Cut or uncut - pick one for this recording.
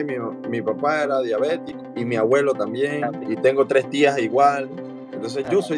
cut